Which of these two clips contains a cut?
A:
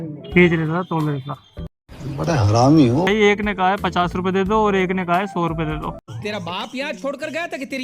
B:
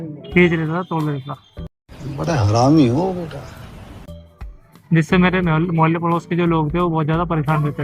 A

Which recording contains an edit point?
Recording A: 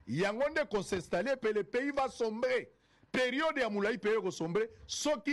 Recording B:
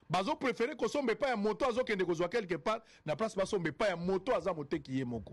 A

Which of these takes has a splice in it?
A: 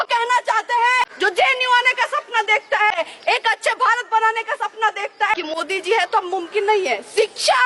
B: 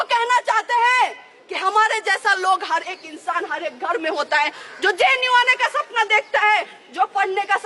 A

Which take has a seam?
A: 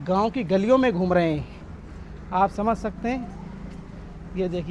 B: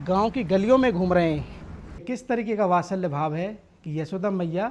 B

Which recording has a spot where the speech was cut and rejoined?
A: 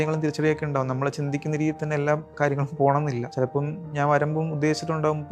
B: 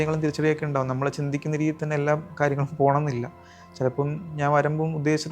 A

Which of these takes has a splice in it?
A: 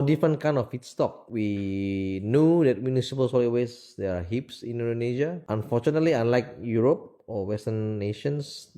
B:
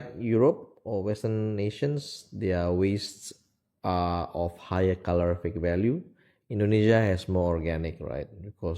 A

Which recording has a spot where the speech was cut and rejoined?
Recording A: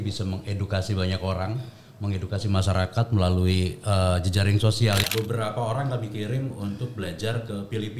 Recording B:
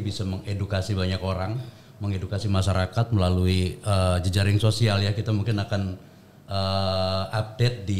A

